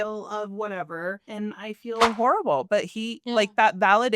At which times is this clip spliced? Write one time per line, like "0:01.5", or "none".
0:01.2